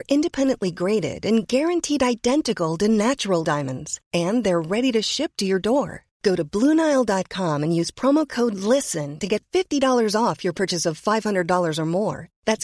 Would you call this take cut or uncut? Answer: uncut